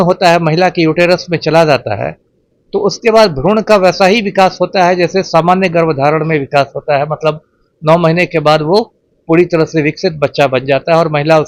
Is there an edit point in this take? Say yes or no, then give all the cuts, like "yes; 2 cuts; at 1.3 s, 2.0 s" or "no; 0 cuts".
no; 0 cuts